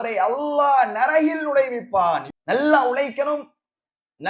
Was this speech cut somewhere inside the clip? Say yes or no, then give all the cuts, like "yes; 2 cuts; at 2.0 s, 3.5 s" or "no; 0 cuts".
yes; 1 cut; at 2.3 s